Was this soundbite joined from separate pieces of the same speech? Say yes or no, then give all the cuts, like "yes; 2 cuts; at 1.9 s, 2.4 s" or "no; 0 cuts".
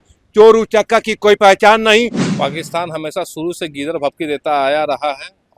yes; 1 cut; at 2.2 s